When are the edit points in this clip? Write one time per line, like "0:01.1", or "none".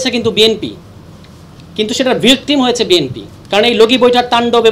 none

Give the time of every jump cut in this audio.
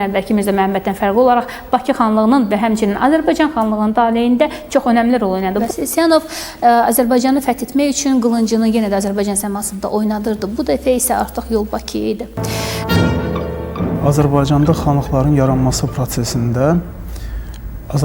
0:05.6
0:12.4

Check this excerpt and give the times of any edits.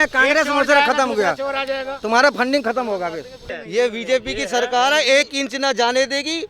0:03.4

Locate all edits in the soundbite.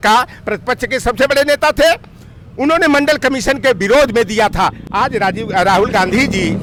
none

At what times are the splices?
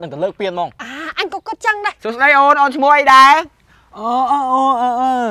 0:02.0

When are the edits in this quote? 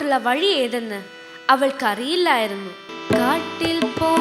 0:02.9

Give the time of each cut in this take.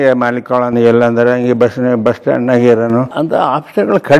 0:03.1

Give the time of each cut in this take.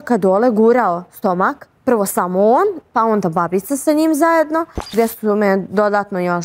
0:01.7
0:04.9

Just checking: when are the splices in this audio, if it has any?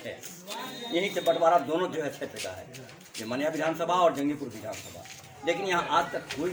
none

